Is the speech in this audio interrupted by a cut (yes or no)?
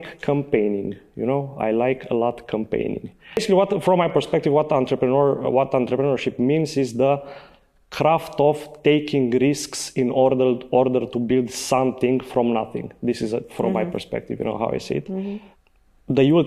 yes